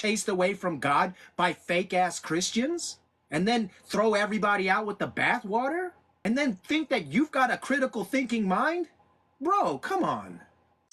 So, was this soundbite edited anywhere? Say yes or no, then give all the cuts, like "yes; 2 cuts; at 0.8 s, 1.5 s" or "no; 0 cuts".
no; 0 cuts